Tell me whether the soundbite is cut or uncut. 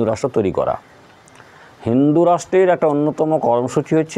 uncut